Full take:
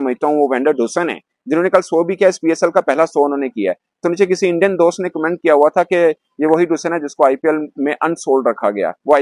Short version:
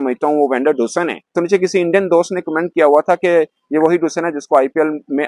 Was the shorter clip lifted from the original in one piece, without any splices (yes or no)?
no